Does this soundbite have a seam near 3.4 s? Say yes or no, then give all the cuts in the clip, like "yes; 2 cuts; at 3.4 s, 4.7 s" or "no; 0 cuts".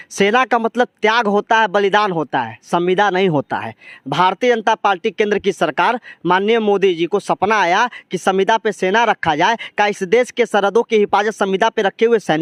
no; 0 cuts